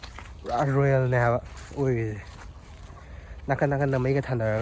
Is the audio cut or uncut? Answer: uncut